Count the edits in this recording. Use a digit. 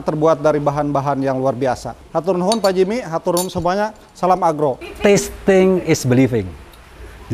2